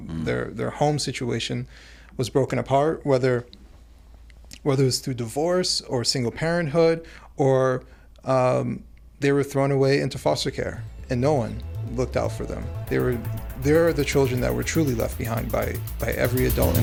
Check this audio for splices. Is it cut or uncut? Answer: uncut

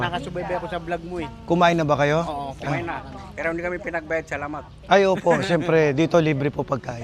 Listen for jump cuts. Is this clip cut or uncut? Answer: uncut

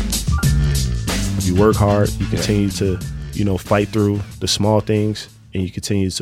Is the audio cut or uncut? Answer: cut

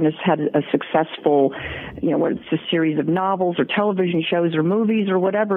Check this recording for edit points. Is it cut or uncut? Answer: uncut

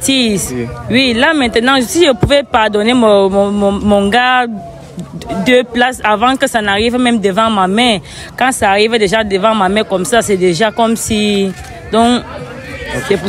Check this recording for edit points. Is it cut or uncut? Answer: uncut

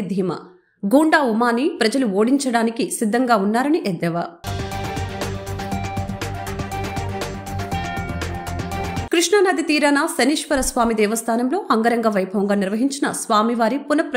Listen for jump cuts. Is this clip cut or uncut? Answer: uncut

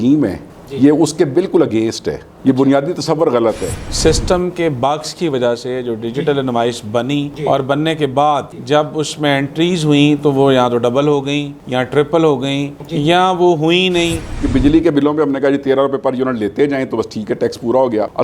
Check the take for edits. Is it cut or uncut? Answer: cut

